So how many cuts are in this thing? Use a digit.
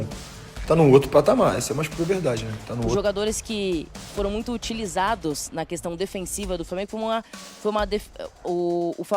1